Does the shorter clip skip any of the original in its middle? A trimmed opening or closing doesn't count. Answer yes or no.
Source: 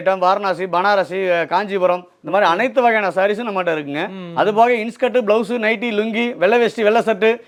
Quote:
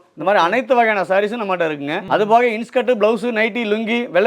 yes